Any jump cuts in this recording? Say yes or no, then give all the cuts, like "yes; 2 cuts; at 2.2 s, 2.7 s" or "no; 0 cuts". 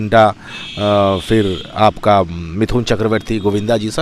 no; 0 cuts